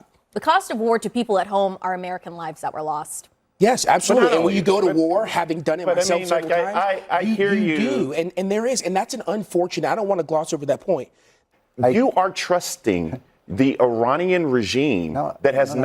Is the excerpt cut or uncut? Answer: cut